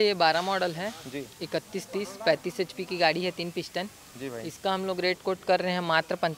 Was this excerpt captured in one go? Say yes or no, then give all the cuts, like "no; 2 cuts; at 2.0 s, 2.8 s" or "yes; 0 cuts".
yes; 0 cuts